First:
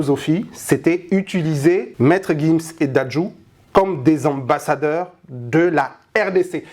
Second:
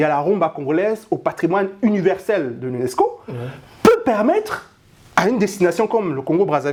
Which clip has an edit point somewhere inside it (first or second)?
first